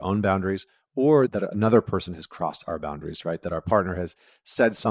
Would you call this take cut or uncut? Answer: cut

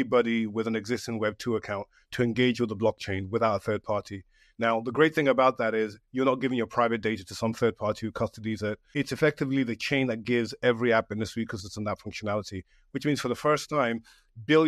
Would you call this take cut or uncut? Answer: cut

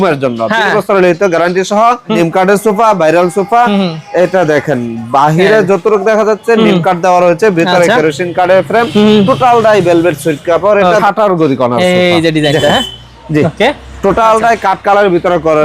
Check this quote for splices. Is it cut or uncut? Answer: cut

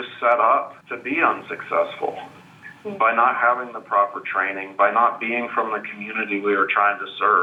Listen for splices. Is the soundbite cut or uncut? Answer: uncut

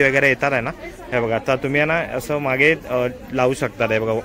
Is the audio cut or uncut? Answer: uncut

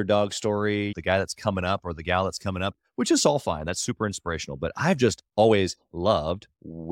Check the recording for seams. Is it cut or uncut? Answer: cut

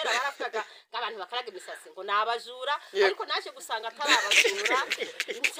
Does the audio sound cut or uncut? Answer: uncut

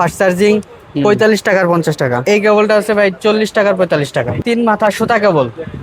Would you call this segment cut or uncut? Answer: cut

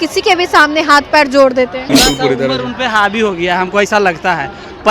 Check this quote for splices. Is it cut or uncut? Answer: cut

